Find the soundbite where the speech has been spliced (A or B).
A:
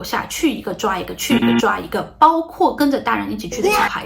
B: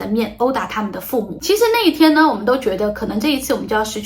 B